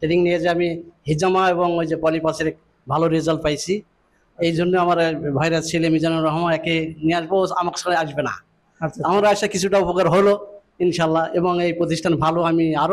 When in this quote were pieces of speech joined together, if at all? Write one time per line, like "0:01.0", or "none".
none